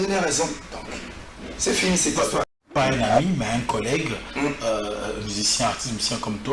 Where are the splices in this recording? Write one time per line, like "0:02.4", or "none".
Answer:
0:02.6

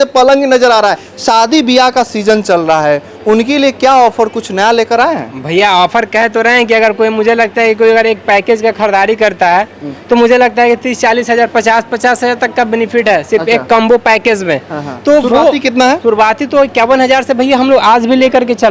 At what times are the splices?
0:01.1

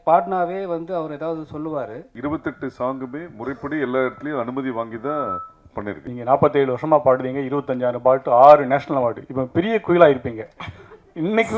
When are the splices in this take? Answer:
0:02.1
0:06.1

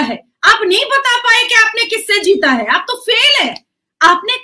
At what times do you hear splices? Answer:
none

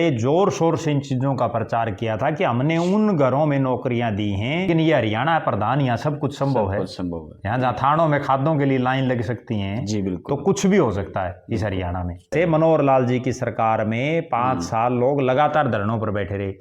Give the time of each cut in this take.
0:04.7
0:12.3

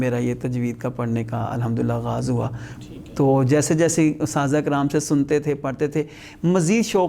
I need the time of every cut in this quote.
none

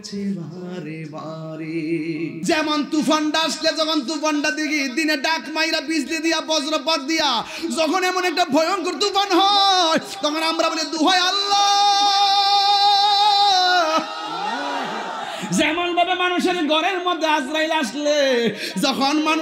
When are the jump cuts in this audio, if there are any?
0:02.3

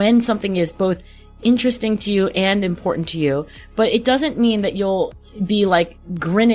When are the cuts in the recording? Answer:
none

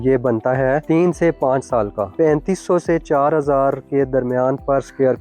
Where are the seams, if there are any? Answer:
0:00.8
0:02.1

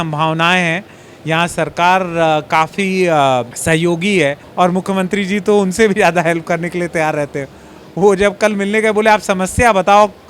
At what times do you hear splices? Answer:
0:03.5
0:04.4

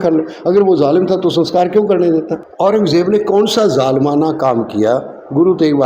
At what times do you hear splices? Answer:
0:02.4

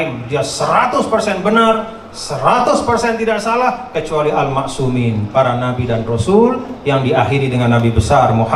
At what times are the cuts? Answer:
none

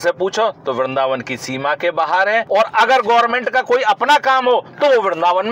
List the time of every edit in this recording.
none

